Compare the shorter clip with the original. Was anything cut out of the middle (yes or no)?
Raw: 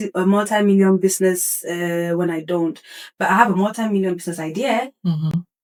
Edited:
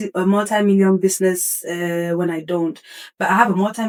no